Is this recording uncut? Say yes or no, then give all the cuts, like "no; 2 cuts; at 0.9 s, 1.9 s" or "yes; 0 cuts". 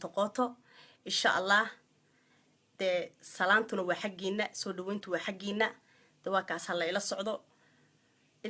yes; 0 cuts